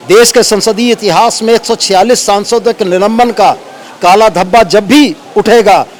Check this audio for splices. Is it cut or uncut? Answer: uncut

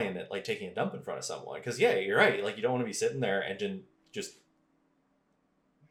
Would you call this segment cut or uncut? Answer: uncut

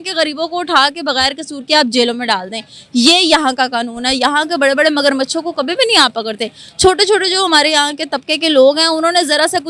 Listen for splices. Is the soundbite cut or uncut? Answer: uncut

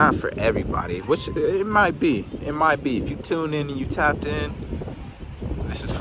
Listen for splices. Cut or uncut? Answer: uncut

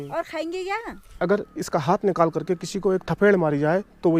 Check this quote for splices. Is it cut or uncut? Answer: cut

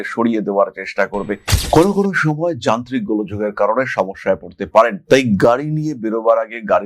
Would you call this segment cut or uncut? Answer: cut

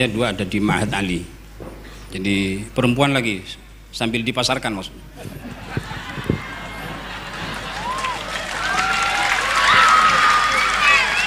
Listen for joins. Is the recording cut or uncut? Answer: uncut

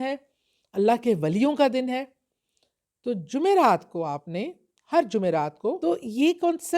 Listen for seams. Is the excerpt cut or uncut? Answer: cut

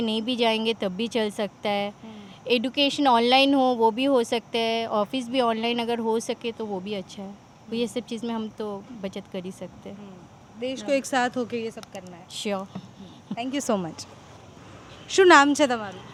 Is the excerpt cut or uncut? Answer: uncut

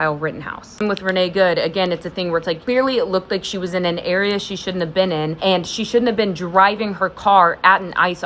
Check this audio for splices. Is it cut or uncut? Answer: cut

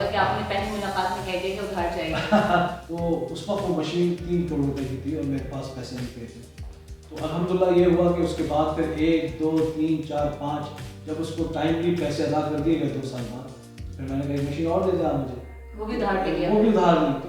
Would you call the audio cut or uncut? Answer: cut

